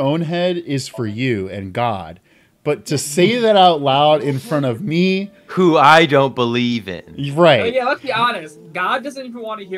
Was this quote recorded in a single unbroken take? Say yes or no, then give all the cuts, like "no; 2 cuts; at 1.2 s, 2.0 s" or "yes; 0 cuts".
yes; 0 cuts